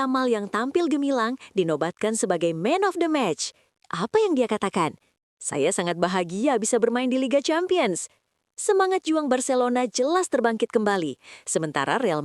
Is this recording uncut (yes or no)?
yes